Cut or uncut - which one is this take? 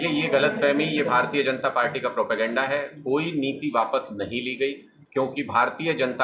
cut